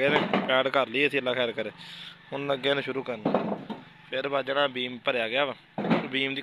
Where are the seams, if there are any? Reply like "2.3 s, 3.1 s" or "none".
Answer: none